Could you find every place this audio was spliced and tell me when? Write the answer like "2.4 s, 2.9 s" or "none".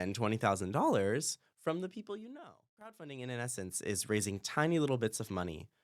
3.0 s